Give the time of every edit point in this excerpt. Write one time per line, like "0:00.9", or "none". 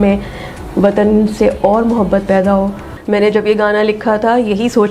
0:02.9